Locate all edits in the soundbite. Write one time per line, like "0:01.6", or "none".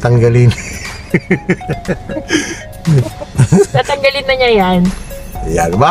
none